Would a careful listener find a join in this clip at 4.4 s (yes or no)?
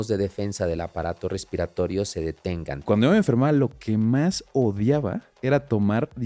no